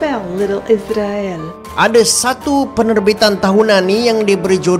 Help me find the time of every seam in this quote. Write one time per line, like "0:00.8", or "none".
0:01.7